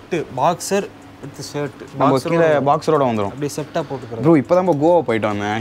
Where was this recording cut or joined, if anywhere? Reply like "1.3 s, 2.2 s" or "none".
1.8 s